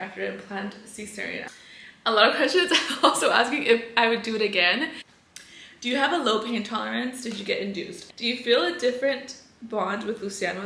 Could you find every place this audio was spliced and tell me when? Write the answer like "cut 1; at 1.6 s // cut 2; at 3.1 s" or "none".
cut 1; at 1.4 s // cut 2; at 5.1 s // cut 3; at 8.0 s